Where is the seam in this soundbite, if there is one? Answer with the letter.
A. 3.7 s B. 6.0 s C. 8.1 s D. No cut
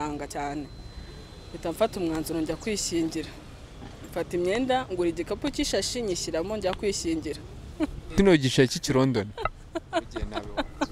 C